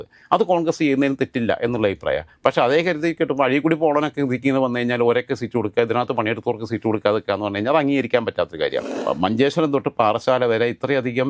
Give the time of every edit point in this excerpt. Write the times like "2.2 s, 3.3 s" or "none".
8.9 s